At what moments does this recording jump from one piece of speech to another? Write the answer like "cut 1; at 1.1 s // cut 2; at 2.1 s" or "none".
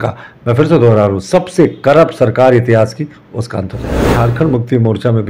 cut 1; at 4.1 s